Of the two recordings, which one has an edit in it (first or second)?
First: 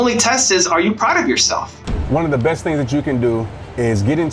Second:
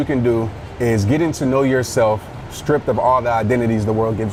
first